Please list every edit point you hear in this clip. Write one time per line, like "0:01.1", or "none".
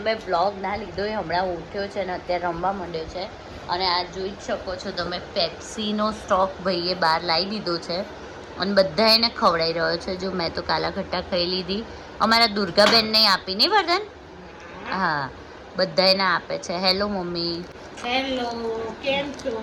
none